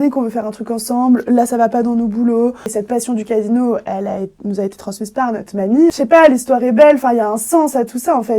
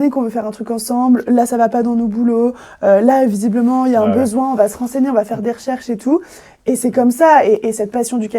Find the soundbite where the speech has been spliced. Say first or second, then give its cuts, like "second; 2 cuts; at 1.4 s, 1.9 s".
first; 2 cuts; at 2.7 s, 5.9 s